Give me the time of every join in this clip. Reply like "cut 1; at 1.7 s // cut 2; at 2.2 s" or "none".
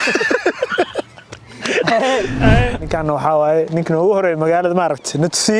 cut 1; at 2.8 s